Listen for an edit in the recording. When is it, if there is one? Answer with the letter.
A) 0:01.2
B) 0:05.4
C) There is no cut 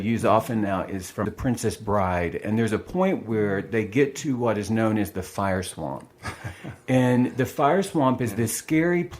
A